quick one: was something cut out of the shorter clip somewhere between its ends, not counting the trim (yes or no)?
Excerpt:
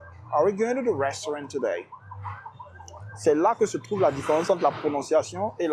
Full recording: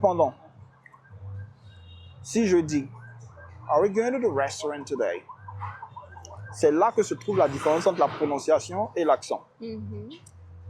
no